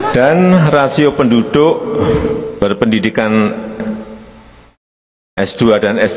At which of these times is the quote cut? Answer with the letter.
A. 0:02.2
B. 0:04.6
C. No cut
C